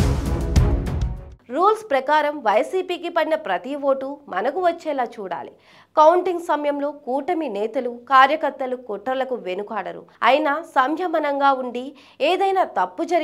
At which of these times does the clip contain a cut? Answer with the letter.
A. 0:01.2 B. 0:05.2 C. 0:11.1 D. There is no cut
A